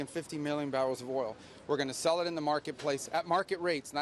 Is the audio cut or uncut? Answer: uncut